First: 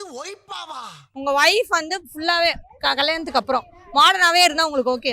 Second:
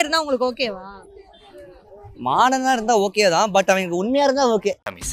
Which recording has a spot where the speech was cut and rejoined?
first; 1 cut; at 1.2 s

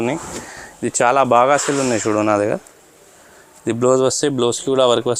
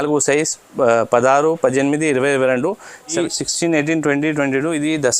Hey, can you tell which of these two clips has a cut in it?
second; 1 cut; at 3.1 s

